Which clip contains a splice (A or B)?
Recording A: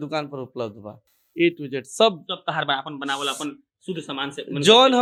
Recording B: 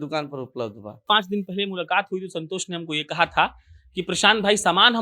B